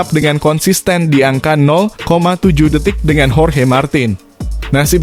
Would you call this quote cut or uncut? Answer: uncut